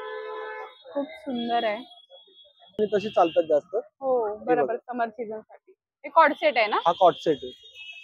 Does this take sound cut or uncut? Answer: cut